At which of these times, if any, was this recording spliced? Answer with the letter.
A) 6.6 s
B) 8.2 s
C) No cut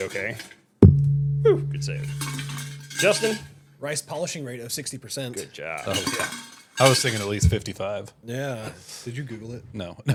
C